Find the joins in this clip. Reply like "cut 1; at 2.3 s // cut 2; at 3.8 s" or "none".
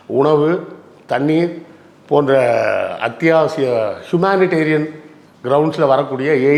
none